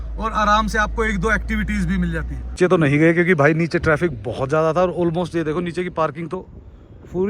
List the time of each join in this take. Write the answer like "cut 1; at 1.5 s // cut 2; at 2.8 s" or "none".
cut 1; at 2.4 s